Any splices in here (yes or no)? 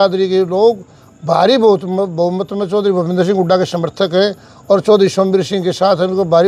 no